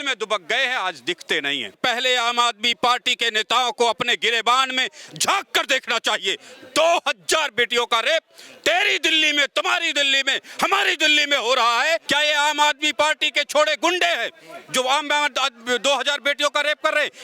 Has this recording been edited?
yes; 2 cuts; at 1.8 s, 12.0 s

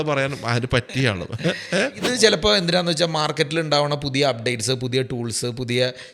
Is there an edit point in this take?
yes; 1 cut; at 2.1 s

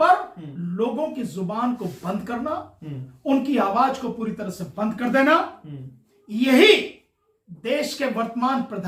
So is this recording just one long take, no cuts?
yes; 0 cuts

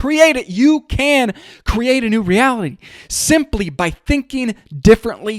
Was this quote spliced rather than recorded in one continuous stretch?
no; 0 cuts

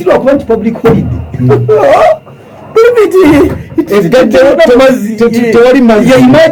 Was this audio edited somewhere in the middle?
no; 0 cuts

